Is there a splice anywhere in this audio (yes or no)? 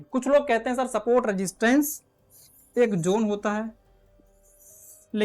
no